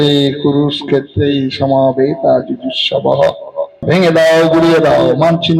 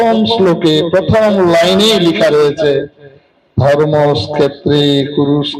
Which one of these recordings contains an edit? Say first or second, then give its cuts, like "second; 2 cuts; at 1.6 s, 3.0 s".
first; 1 cut; at 3.8 s